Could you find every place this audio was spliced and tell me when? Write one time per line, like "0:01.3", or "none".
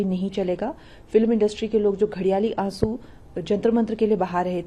none